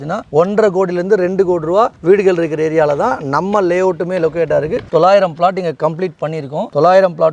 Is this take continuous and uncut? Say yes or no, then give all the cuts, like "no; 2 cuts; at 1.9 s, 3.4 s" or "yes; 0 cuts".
no; 1 cut; at 4.9 s